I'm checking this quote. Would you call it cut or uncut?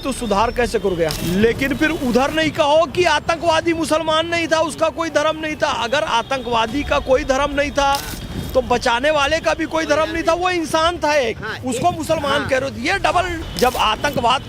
cut